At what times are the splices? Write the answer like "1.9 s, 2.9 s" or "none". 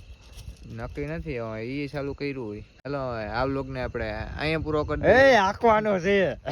2.8 s